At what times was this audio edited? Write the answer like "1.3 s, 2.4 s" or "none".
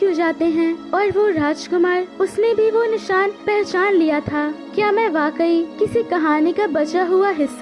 0.8 s, 2.1 s, 3.4 s, 4.6 s, 5.7 s

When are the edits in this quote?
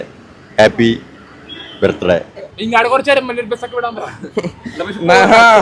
2.5 s

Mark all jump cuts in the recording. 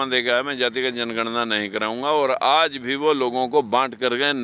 none

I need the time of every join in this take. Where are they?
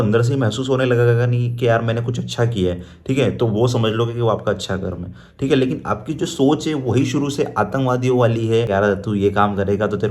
8.7 s

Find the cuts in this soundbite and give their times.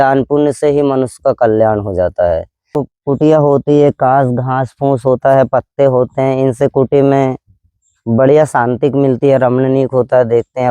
2.8 s

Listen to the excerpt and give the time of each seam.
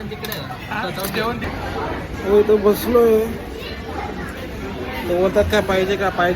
1.4 s

